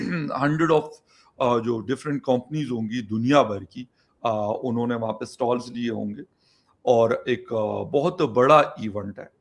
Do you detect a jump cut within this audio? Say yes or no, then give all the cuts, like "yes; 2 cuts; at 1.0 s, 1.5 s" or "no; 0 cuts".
no; 0 cuts